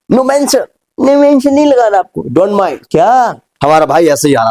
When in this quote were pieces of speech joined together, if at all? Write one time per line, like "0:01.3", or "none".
0:03.4